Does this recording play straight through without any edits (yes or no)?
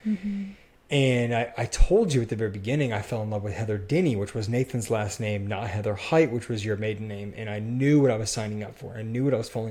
yes